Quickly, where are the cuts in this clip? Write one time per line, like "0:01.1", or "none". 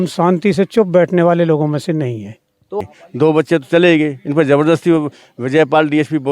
0:02.8